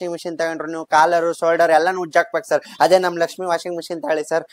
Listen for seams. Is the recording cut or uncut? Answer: uncut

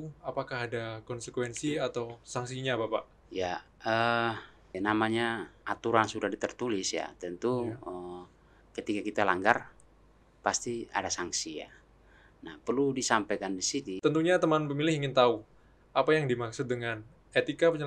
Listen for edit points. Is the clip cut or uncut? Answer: cut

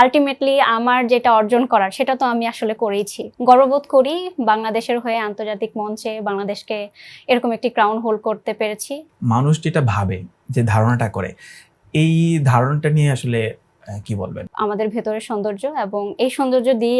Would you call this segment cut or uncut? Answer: cut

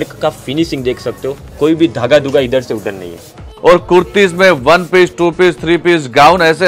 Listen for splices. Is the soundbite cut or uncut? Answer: cut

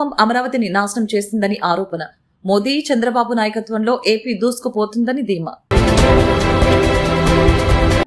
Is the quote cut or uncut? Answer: uncut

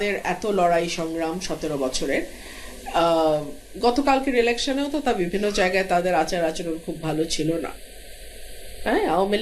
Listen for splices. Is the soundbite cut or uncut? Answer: uncut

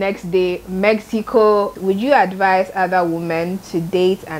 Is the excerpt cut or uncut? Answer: cut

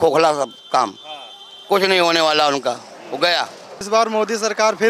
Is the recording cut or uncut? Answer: cut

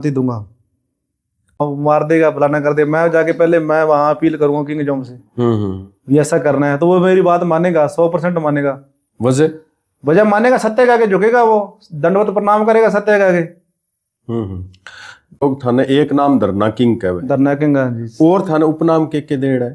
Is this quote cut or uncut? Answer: cut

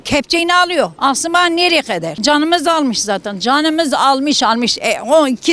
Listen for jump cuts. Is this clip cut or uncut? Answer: cut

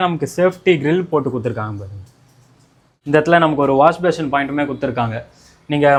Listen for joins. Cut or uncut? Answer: uncut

